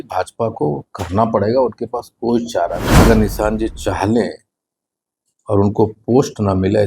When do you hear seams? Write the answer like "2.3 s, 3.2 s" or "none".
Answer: 3.0 s